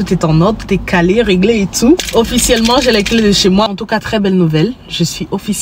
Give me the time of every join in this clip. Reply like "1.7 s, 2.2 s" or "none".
2.1 s, 3.7 s